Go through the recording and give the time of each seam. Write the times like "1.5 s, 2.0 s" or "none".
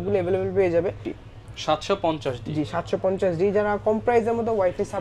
1.1 s